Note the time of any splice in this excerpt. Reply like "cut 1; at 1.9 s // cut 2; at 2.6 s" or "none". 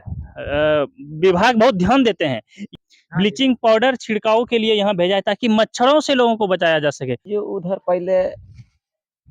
cut 1; at 2.7 s // cut 2; at 7.2 s